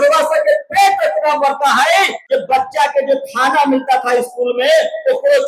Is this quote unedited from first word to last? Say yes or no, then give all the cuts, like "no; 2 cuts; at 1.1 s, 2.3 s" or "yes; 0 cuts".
no; 1 cut; at 2.2 s